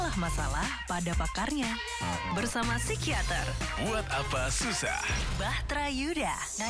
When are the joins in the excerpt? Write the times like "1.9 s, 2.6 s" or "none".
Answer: none

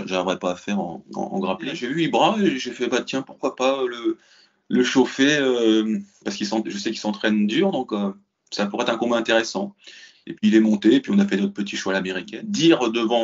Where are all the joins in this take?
1.8 s, 12.2 s

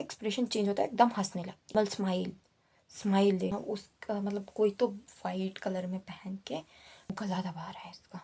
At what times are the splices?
1.7 s, 3.5 s, 7.1 s

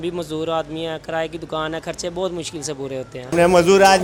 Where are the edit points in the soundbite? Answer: none

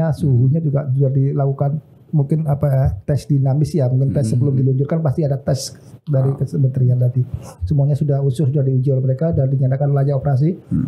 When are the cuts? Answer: none

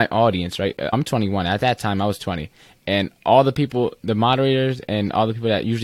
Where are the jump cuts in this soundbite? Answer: 0.9 s

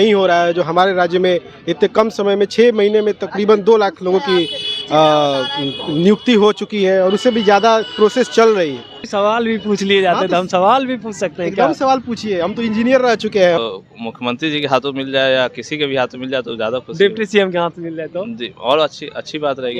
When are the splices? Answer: 9.1 s, 13.6 s

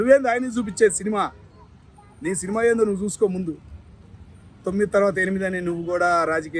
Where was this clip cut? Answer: none

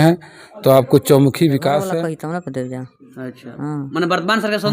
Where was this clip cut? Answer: 1.9 s

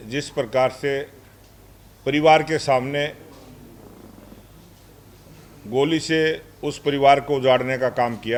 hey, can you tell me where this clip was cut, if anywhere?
none

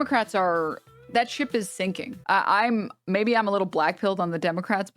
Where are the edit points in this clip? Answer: 2.2 s

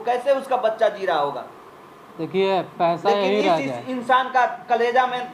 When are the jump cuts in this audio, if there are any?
none

